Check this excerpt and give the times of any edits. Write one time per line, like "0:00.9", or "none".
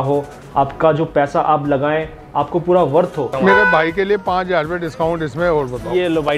0:03.3